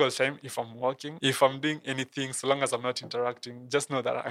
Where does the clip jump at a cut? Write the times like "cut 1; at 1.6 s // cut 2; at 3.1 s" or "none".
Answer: cut 1; at 1.1 s